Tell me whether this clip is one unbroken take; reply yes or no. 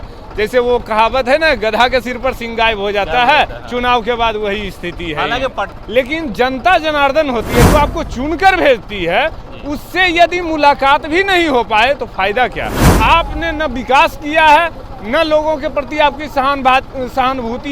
no